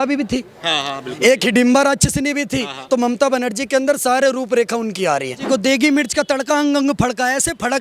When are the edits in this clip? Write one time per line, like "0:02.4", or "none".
0:05.4